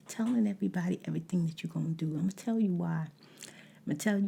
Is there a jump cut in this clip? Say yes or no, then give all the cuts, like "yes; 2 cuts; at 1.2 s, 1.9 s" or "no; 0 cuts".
no; 0 cuts